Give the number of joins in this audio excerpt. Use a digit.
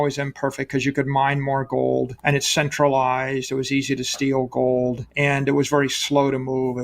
2